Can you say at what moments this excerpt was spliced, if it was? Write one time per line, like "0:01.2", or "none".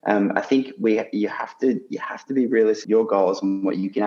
0:02.8